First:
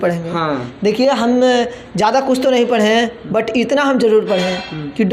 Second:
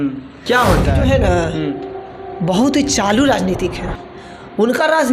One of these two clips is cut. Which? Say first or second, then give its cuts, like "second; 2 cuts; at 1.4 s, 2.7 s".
second; 1 cut; at 0.9 s